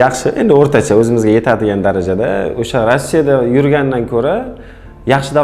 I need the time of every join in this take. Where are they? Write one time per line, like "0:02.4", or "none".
none